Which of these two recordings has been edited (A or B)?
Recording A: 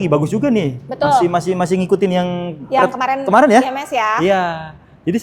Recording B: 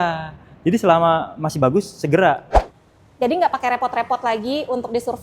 B